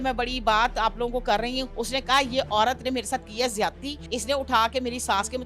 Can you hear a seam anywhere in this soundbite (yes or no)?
yes